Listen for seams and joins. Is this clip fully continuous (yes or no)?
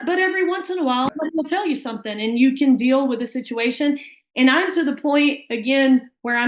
no